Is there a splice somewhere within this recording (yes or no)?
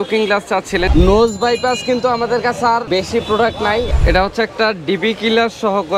yes